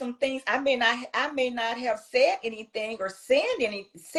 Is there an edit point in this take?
no; 0 cuts

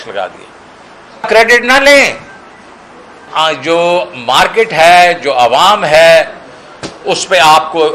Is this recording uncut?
no; 2 cuts; at 1.3 s, 3.3 s

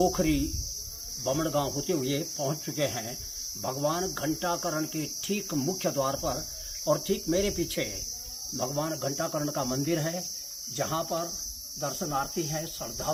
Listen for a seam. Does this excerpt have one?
no; 0 cuts

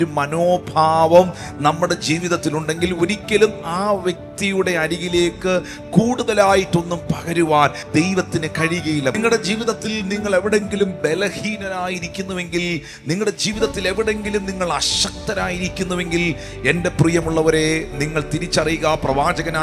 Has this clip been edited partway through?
yes; 2 cuts; at 7.8 s, 9.1 s

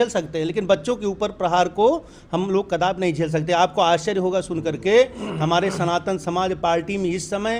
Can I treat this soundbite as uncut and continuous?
yes; 0 cuts

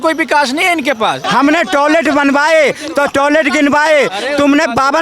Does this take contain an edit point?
yes; 1 cut; at 1.2 s

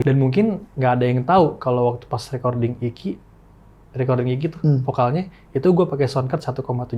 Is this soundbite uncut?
yes; 0 cuts

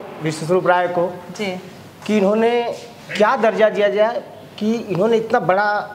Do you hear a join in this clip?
no; 0 cuts

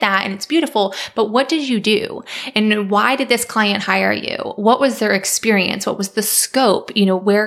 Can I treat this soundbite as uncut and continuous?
yes; 0 cuts

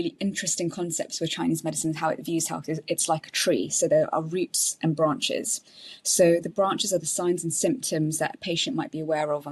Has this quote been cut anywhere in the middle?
no; 0 cuts

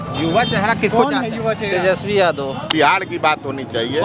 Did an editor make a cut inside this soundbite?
yes; 1 cut; at 2.6 s

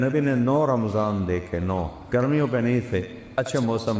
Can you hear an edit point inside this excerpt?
yes; 1 cut; at 2.0 s

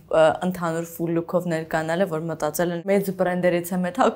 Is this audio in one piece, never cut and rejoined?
no; 1 cut; at 2.8 s

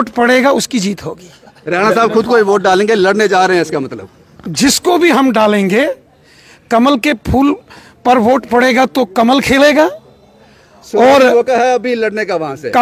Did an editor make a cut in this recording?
no; 0 cuts

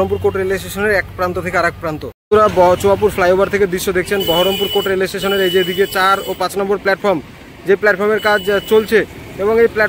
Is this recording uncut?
no; 1 cut; at 2.1 s

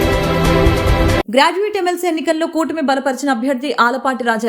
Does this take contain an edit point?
yes; 1 cut; at 1.2 s

